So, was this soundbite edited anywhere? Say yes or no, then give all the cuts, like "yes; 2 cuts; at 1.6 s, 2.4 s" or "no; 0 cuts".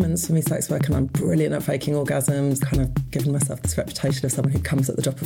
yes; 1 cut; at 2.6 s